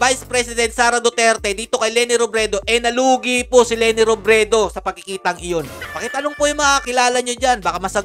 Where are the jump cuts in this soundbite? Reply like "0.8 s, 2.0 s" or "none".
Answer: 5.8 s, 6.8 s